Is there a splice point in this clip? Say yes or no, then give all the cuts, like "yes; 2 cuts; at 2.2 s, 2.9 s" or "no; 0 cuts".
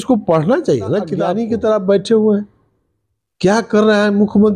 yes; 1 cut; at 1.2 s